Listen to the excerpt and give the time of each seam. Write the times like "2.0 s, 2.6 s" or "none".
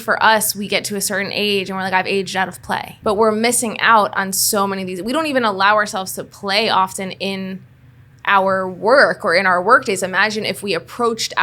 2.9 s